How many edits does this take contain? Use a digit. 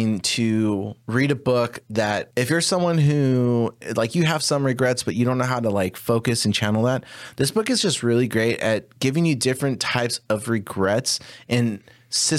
3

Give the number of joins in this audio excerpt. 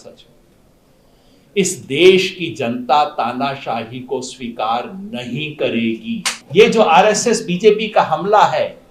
1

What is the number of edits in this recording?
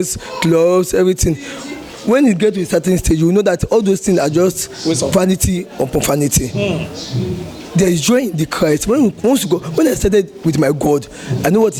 0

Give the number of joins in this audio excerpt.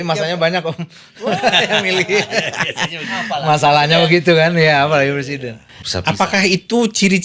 1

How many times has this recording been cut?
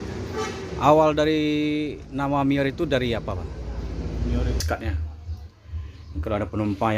1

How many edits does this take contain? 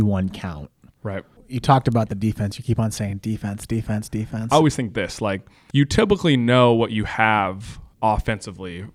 3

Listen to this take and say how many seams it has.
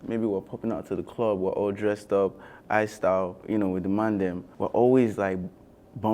2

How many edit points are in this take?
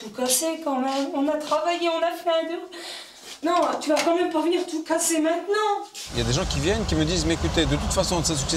2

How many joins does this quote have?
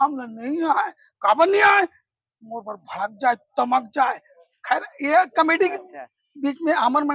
0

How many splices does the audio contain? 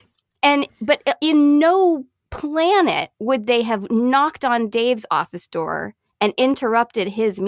0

